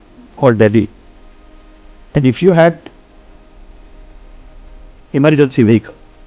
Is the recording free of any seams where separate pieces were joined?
yes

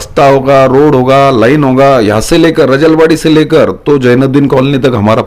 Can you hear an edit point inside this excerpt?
no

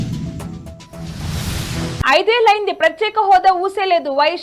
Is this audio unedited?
yes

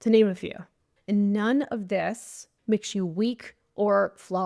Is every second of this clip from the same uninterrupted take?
no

